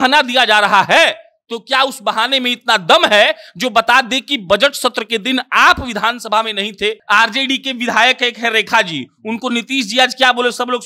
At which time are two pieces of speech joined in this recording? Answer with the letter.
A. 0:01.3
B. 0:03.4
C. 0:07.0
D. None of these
C